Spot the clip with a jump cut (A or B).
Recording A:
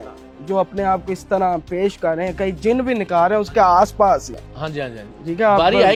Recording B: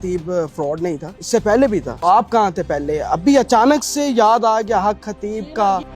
B